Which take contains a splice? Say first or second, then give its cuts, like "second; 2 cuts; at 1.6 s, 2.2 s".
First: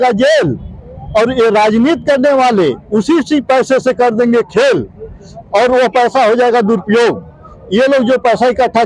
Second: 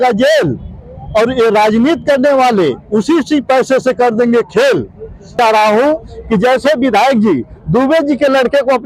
second; 1 cut; at 5.3 s